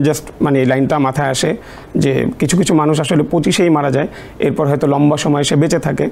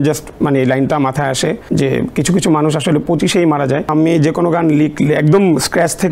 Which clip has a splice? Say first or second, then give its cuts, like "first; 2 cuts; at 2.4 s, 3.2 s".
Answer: second; 2 cuts; at 1.6 s, 3.9 s